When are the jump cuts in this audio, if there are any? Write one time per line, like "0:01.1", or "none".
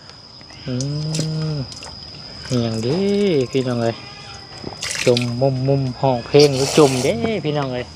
none